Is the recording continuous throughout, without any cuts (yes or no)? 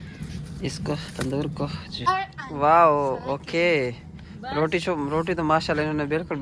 no